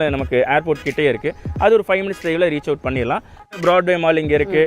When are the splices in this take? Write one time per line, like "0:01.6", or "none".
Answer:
0:03.5